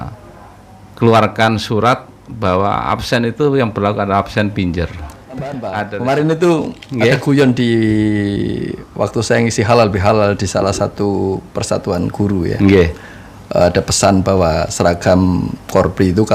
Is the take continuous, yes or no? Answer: no